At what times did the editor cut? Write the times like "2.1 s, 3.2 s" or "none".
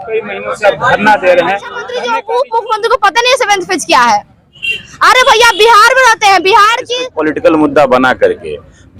1.9 s, 7.0 s